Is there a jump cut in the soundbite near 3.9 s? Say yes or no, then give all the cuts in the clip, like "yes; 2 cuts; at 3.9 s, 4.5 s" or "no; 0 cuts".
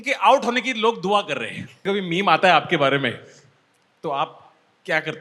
no; 1 cut; at 1.8 s